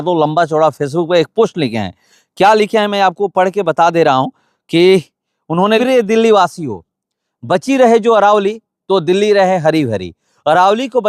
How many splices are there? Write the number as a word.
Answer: one